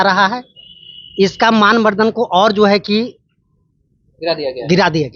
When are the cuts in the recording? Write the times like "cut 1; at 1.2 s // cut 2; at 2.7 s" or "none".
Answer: none